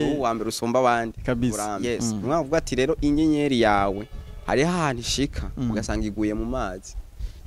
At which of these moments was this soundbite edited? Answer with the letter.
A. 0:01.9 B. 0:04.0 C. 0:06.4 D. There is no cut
A